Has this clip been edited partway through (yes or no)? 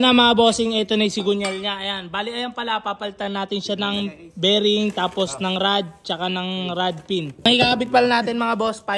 yes